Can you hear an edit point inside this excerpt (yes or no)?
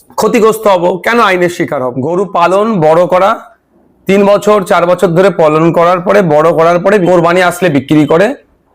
yes